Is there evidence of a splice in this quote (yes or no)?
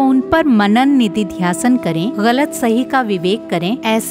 no